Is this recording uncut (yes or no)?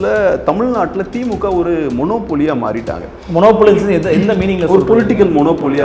yes